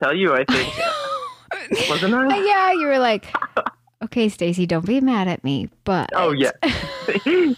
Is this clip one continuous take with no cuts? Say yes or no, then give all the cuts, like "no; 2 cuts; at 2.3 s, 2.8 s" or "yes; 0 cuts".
yes; 0 cuts